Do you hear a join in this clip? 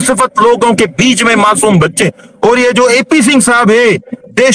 yes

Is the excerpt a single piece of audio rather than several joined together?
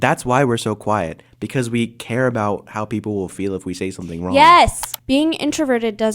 no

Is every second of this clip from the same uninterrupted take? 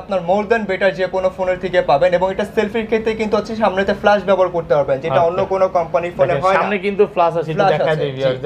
yes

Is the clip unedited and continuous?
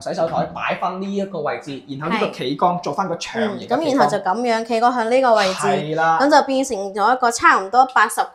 yes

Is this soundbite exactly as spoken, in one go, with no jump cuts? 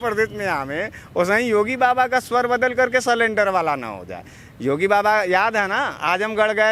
yes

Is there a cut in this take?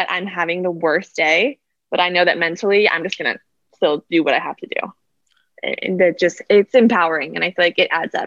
no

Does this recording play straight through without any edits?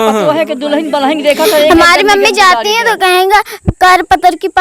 yes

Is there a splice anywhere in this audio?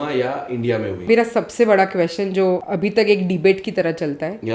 yes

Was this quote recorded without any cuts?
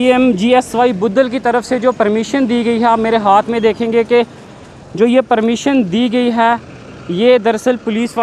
yes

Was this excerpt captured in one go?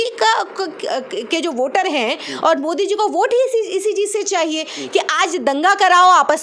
yes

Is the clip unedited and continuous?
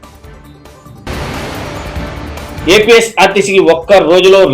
no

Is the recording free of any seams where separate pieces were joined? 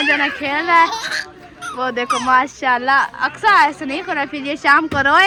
yes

